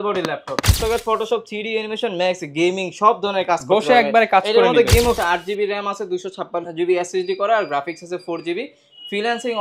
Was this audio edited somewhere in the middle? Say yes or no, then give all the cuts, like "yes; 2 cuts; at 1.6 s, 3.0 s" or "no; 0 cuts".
yes; 2 cuts; at 0.8 s, 5.2 s